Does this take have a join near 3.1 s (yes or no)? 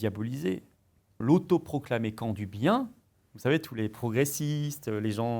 no